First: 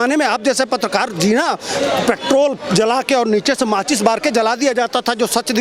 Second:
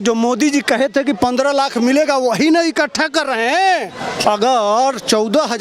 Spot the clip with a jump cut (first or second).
second